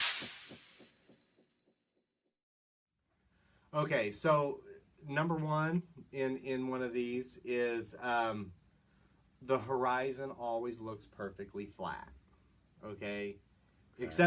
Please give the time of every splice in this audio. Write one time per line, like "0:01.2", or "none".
none